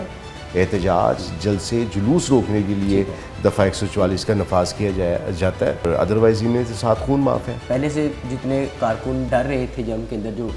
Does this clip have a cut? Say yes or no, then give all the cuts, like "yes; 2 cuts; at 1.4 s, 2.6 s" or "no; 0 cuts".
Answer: yes; 3 cuts; at 5.8 s, 7.5 s, 9.3 s